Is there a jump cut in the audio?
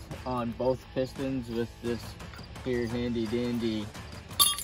no; 0 cuts

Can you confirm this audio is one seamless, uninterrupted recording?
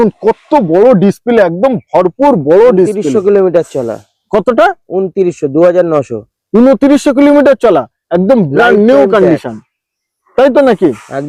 yes; 0 cuts

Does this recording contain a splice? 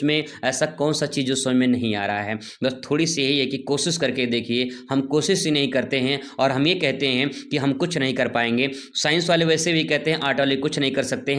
no; 0 cuts

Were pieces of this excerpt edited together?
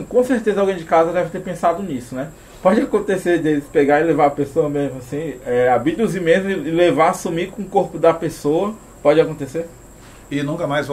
no; 0 cuts

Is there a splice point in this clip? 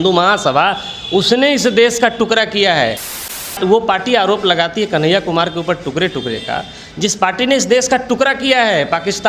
yes; 1 cut; at 3.5 s

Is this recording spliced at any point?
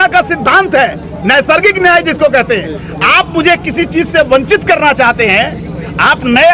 no; 0 cuts

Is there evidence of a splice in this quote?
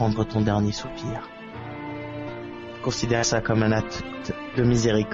no; 0 cuts

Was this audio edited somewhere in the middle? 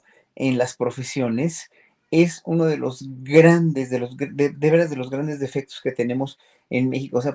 no; 0 cuts

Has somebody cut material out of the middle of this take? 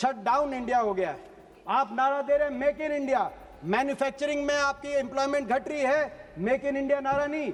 no; 0 cuts

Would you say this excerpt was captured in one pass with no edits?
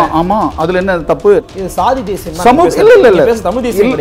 no; 1 cut; at 1.4 s

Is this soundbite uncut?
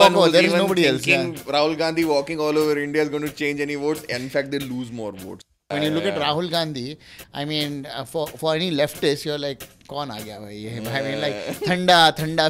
no; 1 cut; at 5.7 s

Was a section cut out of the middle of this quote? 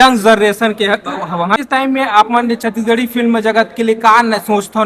yes; 1 cut; at 1.6 s

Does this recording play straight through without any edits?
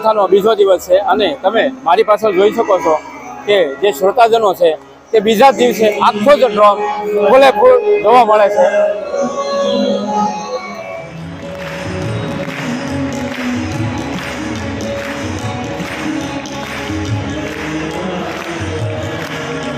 yes; 0 cuts

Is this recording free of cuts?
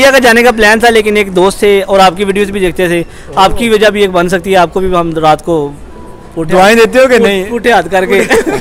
yes; 0 cuts

